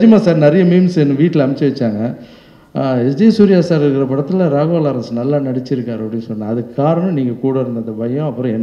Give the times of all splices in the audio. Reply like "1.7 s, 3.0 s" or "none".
none